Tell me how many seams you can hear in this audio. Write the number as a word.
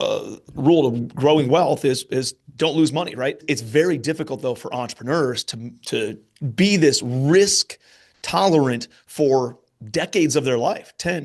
one